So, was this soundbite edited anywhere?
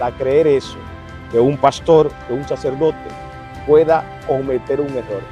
no; 0 cuts

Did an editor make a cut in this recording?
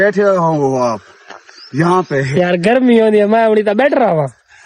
no; 0 cuts

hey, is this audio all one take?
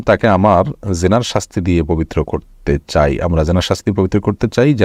yes; 0 cuts

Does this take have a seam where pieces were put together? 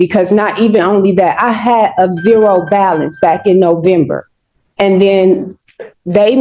no; 0 cuts

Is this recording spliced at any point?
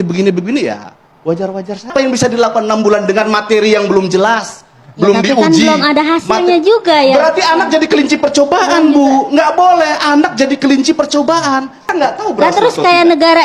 yes; 2 cuts; at 1.9 s, 11.8 s

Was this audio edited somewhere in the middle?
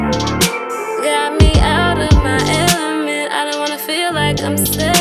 no; 0 cuts

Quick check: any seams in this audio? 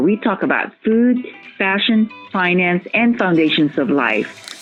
no; 0 cuts

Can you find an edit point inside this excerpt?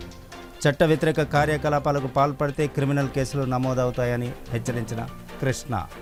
no; 0 cuts

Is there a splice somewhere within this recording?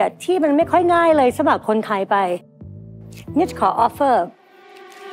no; 0 cuts

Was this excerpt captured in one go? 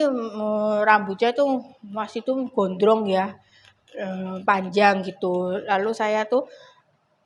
yes; 0 cuts

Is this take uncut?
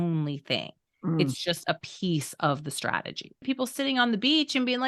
no; 1 cut; at 3.4 s

